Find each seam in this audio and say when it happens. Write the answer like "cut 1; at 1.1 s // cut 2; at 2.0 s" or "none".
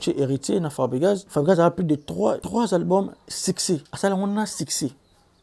cut 1; at 1.3 s // cut 2; at 2.4 s // cut 3; at 3.9 s